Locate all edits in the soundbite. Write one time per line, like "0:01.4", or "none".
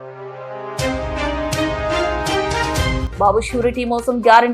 0:03.0

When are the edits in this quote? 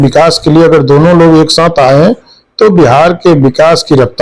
none

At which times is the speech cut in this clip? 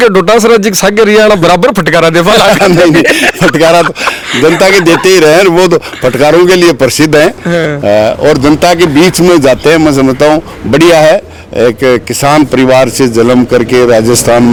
none

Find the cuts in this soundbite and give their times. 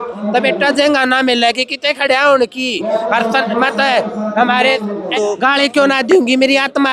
0:05.1

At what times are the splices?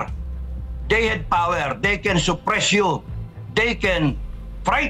none

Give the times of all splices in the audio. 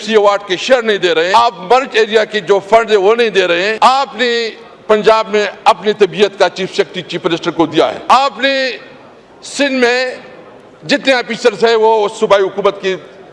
0:01.3
0:03.7
0:08.1

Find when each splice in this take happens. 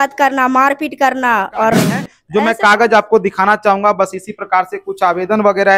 0:02.1

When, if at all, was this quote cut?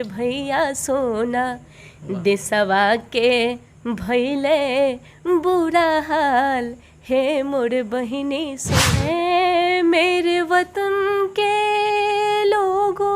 0:08.7

